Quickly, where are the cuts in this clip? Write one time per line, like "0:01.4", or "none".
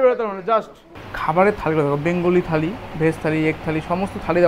0:01.1